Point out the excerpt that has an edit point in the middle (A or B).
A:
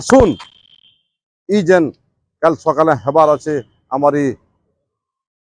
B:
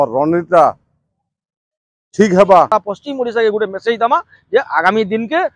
B